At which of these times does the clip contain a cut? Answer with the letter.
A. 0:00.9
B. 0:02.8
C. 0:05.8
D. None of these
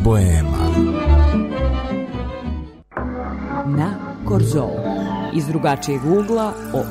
D